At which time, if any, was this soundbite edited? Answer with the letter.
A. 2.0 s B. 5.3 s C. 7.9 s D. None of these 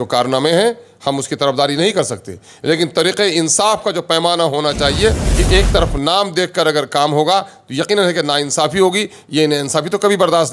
B